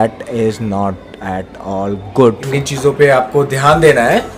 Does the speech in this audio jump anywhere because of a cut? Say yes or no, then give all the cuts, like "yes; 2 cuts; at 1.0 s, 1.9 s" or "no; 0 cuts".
yes; 1 cut; at 2.4 s